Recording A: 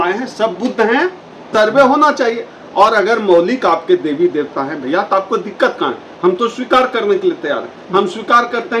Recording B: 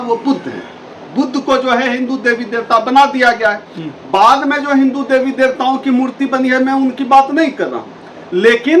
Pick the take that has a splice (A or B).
A